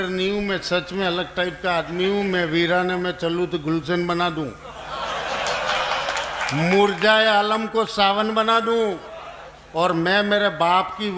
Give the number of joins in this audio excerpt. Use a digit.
0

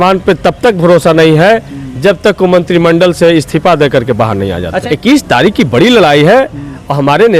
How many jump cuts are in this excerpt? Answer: 1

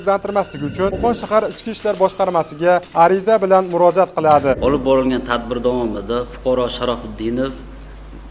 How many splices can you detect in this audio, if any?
2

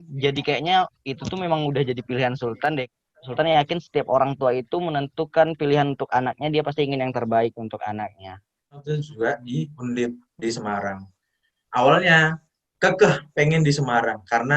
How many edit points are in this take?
2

